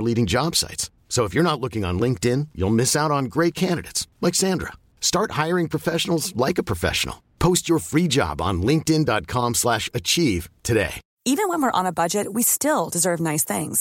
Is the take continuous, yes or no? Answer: no